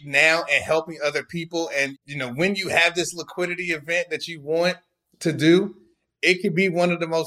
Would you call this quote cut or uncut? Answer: cut